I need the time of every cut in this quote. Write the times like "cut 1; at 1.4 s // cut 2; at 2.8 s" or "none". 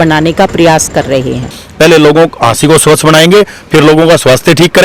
cut 1; at 1.6 s